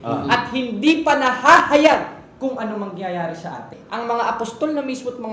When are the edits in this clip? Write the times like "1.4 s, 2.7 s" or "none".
3.8 s